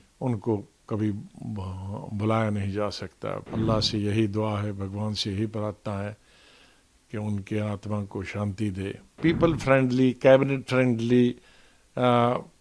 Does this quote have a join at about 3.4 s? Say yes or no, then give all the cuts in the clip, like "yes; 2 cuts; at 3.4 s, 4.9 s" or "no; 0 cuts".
yes; 2 cuts; at 3.4 s, 9.2 s